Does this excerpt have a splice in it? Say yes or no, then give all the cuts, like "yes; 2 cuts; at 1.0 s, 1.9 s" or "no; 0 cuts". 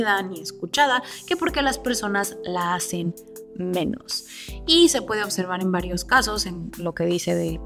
no; 0 cuts